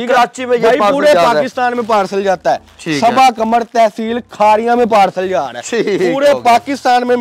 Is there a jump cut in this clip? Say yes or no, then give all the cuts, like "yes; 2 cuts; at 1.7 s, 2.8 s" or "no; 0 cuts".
no; 0 cuts